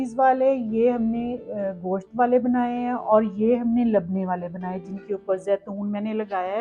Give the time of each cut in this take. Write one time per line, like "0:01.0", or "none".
none